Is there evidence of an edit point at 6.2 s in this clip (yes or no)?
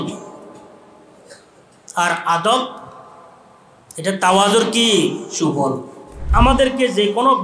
yes